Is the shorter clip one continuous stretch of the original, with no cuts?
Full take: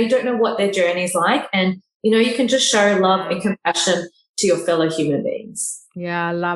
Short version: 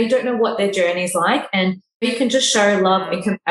no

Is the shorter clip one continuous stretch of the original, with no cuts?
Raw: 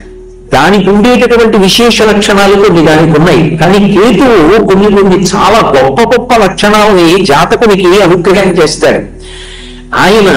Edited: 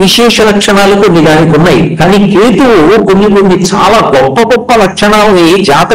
yes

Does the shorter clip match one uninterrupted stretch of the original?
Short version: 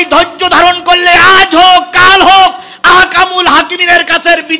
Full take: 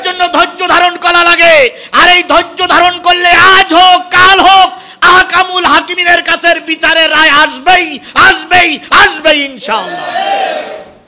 yes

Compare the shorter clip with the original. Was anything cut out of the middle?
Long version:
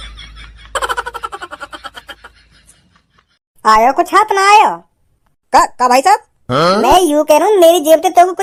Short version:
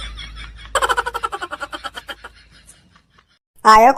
no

